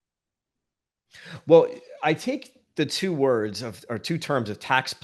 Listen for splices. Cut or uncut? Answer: uncut